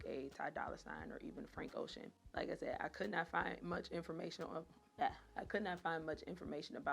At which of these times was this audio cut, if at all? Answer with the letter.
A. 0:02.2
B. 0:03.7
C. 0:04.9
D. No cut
D